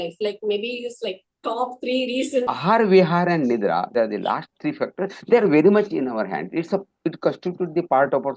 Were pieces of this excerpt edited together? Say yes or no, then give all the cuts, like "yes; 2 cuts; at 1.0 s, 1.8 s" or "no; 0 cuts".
yes; 2 cuts; at 2.5 s, 3.9 s